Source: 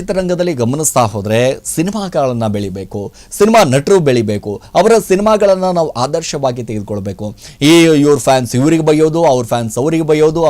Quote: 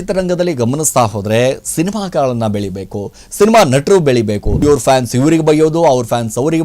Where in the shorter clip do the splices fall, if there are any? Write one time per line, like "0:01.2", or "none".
0:04.6